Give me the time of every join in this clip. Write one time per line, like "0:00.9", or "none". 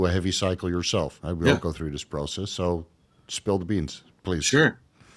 0:01.2